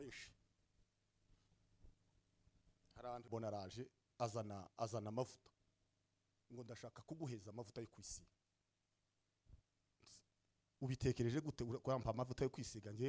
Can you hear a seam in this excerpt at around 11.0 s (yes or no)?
no